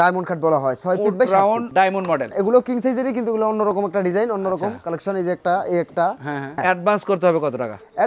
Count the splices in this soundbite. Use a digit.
2